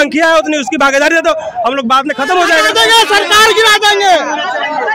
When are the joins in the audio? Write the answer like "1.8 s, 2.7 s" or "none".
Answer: 2.7 s